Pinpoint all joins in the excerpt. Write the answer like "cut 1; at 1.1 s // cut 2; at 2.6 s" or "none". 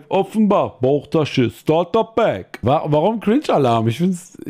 cut 1; at 2.6 s